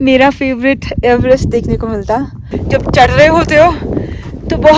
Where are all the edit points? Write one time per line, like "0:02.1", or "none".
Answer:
0:02.5